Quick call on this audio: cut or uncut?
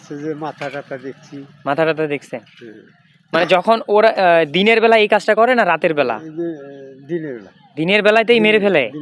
uncut